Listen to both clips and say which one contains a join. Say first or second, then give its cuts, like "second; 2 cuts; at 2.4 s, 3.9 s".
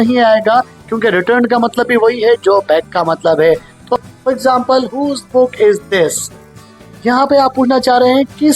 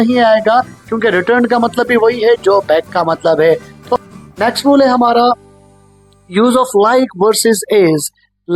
first; 1 cut; at 4.1 s